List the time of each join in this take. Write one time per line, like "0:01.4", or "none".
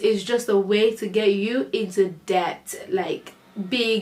none